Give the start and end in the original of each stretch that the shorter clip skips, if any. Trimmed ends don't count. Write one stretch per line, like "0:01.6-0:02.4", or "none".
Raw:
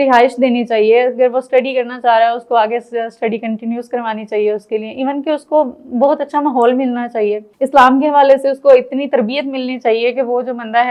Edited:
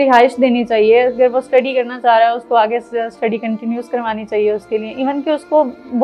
none